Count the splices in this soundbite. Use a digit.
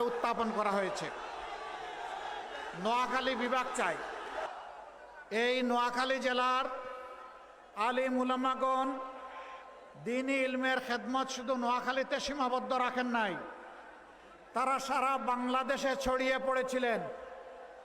1